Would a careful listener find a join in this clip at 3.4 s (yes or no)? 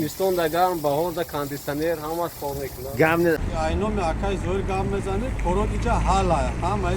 yes